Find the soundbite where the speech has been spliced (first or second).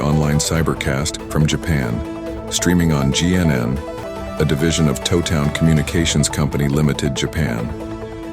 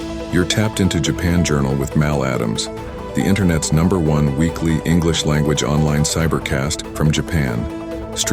first